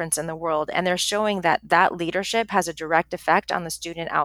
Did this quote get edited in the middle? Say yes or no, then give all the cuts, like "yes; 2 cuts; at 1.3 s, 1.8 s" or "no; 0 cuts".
no; 0 cuts